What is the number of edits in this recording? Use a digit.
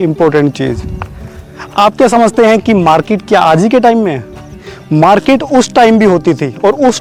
0